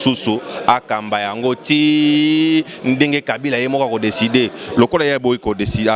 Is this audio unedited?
yes; 0 cuts

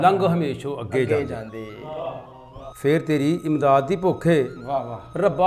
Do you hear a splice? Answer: yes; 1 cut; at 2.7 s

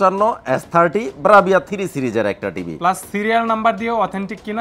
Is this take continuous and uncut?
yes; 0 cuts

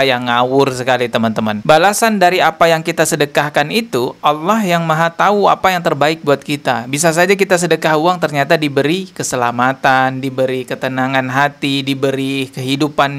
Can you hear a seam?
yes; 1 cut; at 1.6 s

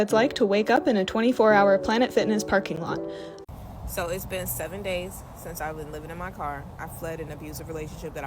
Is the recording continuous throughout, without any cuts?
no; 1 cut; at 3.3 s

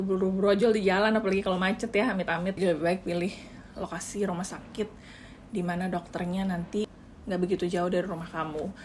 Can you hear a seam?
no; 0 cuts

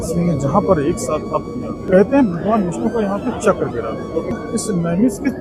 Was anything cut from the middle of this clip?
yes; 2 cuts; at 1.8 s, 4.4 s

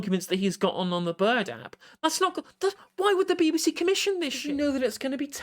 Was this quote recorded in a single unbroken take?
no; 1 cut; at 4.4 s

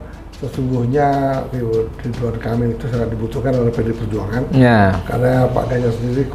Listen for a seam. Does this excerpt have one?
no; 0 cuts

